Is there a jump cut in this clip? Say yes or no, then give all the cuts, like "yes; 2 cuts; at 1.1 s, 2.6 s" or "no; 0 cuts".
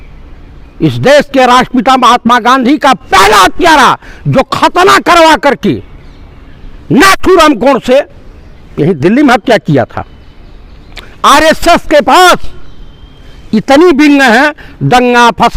no; 0 cuts